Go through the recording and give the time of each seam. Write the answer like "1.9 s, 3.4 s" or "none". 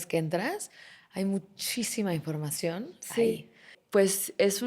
3.7 s